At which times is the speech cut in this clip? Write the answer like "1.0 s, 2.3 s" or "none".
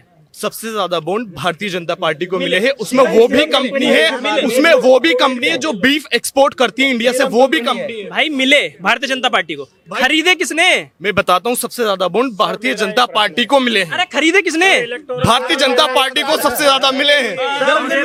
none